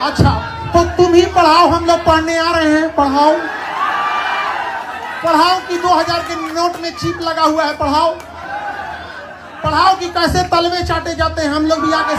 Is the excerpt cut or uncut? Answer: uncut